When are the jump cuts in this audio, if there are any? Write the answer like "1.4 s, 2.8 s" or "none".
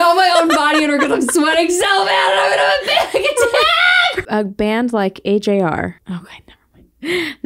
4.2 s, 6.0 s